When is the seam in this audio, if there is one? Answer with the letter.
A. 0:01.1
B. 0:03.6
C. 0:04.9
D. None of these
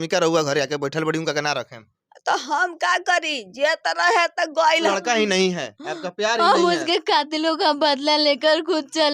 C